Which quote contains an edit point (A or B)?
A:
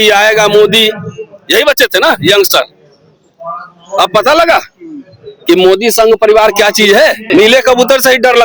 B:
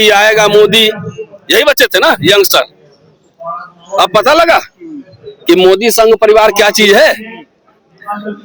A